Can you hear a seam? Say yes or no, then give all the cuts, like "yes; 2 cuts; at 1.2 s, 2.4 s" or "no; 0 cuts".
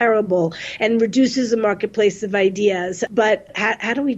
yes; 1 cut; at 3.1 s